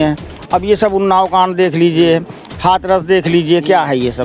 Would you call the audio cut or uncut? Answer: uncut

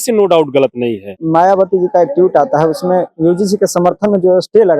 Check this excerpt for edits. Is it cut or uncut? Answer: cut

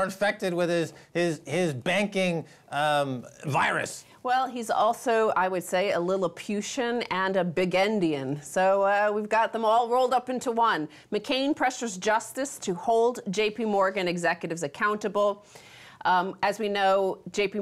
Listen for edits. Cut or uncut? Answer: cut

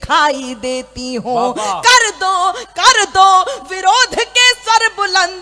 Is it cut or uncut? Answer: cut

